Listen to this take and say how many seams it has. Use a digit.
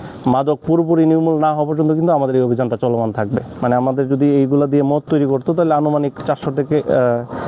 1